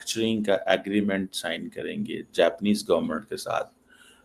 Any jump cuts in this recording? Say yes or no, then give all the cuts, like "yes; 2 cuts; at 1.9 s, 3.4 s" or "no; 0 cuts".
no; 0 cuts